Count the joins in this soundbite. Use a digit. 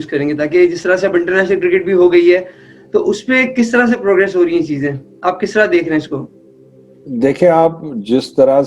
0